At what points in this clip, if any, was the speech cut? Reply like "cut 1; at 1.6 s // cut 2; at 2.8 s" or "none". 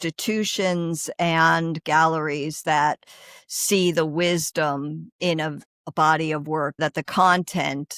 cut 1; at 5.7 s // cut 2; at 6.8 s